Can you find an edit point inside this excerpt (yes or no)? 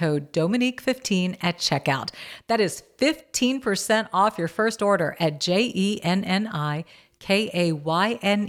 no